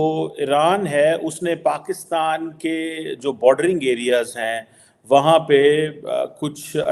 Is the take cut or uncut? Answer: uncut